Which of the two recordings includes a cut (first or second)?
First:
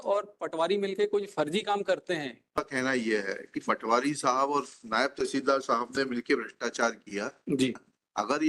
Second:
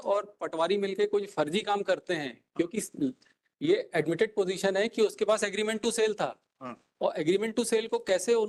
first